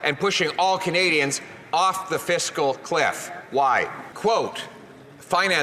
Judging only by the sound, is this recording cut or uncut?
cut